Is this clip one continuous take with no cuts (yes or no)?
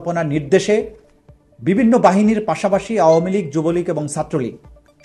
yes